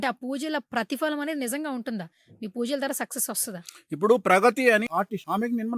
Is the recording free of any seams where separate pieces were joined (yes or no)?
no